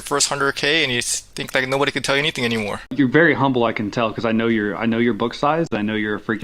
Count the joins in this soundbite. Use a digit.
2